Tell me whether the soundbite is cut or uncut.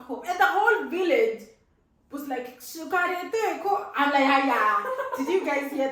uncut